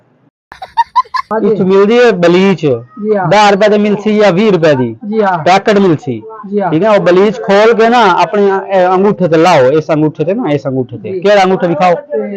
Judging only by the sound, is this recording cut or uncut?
cut